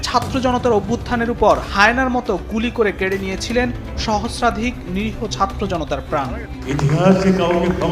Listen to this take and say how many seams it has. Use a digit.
1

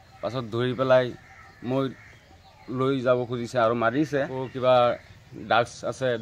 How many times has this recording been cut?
1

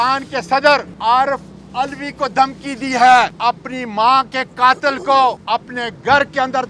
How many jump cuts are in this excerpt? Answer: 3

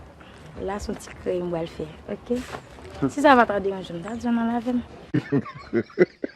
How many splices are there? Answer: 1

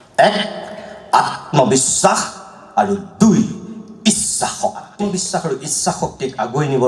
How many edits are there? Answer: 1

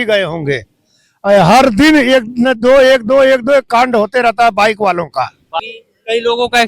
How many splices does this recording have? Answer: 1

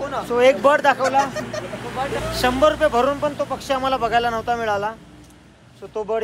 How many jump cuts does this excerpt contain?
1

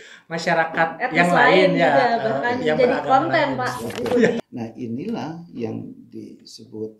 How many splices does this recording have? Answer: 1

